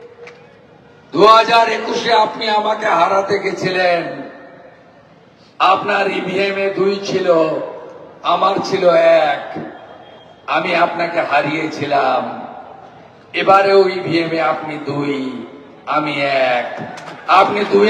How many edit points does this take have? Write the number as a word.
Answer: zero